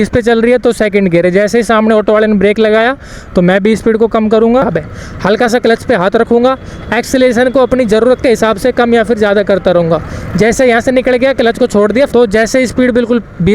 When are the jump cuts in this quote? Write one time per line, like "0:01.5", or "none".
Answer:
0:04.7
0:12.1

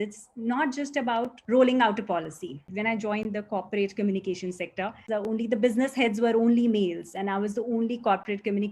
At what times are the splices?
0:01.4
0:02.7
0:05.0

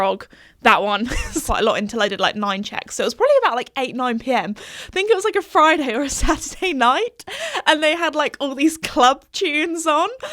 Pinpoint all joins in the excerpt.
0:01.4

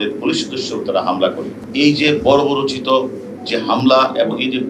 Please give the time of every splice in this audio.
0:01.6

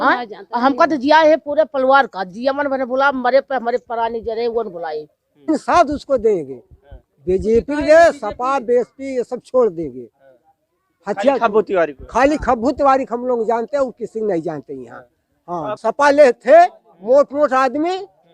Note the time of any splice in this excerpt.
0:05.5
0:15.7

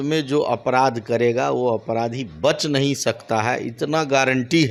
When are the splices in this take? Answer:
none

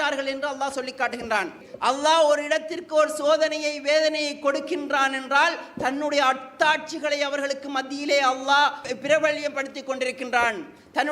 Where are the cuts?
0:01.7
0:08.8

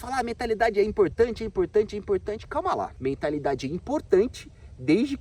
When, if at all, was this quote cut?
0:02.9

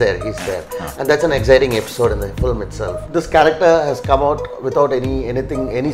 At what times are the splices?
0:03.0

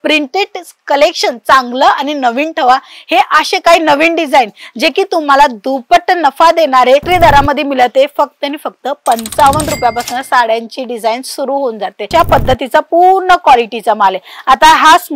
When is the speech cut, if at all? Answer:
0:07.0
0:12.1

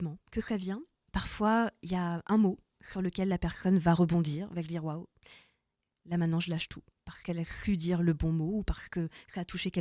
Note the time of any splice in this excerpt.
none

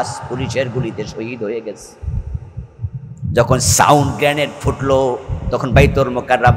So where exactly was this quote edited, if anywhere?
none

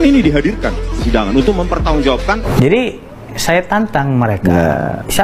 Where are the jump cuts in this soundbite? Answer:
0:02.4

